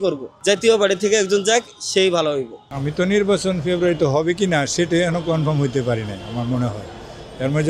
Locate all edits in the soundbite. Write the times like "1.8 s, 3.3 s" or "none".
2.7 s